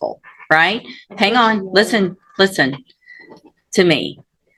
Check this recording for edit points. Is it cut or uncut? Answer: uncut